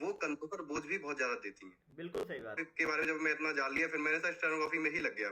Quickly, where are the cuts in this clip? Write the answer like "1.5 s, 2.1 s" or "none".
2.6 s

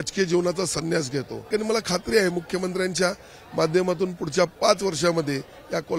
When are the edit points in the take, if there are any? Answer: 1.4 s

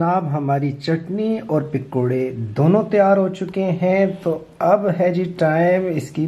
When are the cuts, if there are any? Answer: none

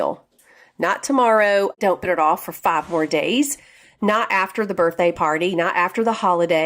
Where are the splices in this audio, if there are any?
1.8 s

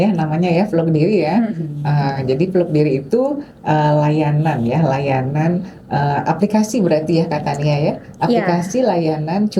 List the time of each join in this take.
none

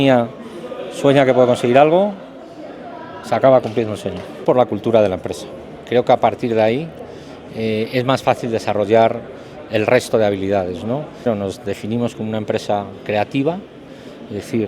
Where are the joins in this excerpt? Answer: 4.4 s, 11.3 s

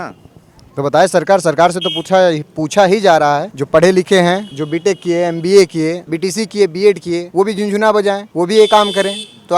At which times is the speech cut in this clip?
3.5 s, 4.5 s, 6.1 s, 7.3 s, 8.3 s

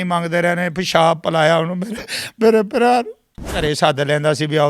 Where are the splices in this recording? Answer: 3.6 s

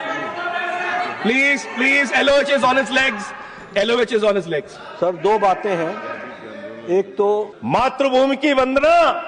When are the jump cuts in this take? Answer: 7.5 s

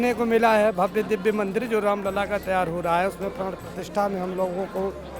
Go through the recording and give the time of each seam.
none

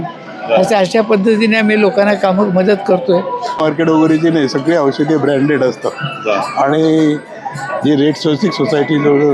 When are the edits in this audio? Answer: 3.6 s

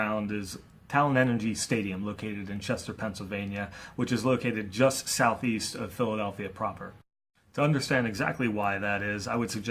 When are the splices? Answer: 6.1 s

